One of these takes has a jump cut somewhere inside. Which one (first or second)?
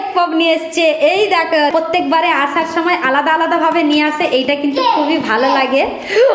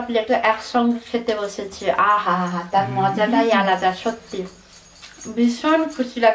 first